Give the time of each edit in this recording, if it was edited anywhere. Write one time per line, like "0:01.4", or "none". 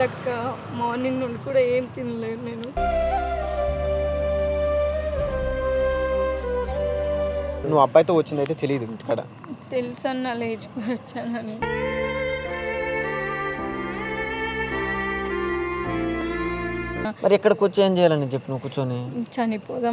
0:07.6
0:17.0